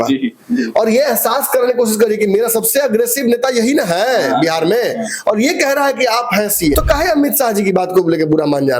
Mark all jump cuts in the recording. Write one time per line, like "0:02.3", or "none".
0:06.7